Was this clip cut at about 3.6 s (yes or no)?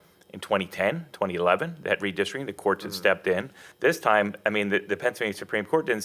yes